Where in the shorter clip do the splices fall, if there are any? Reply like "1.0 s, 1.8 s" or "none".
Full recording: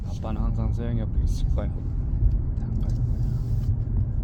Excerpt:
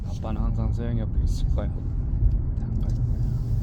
none